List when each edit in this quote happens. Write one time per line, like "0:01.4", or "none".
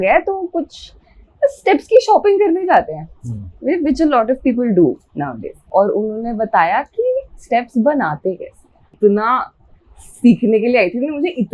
0:05.5
0:09.0